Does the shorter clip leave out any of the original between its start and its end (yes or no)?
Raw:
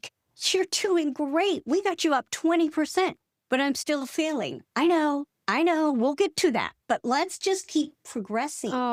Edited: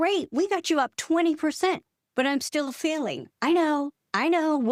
no